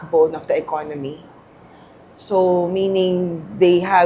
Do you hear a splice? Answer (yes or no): no